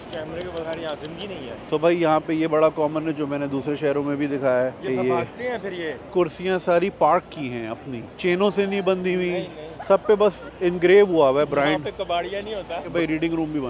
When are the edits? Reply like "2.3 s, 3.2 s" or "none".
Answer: 1.6 s, 6.1 s, 12.9 s